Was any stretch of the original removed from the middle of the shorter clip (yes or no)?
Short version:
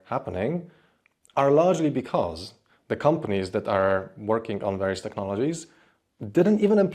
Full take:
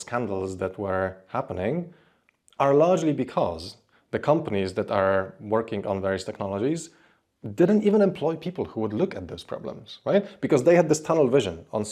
no